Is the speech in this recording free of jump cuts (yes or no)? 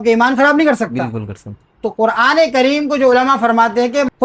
yes